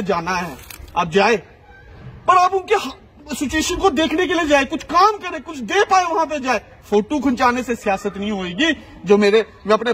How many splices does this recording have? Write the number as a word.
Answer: zero